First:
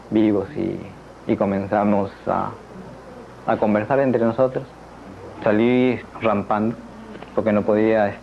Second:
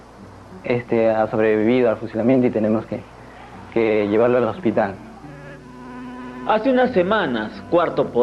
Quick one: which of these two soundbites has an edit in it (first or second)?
first